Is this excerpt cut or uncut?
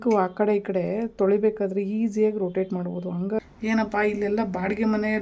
cut